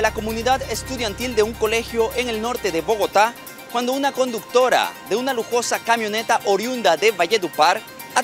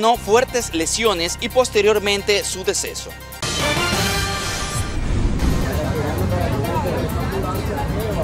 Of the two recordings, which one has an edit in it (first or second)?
second